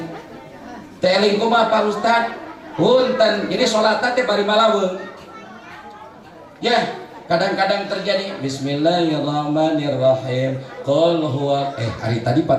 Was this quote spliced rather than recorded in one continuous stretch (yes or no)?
no